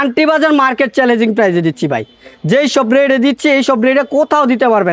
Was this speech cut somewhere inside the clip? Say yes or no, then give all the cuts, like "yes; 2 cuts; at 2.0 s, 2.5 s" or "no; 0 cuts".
no; 0 cuts